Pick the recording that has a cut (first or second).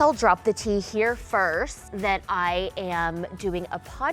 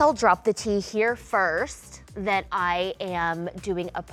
first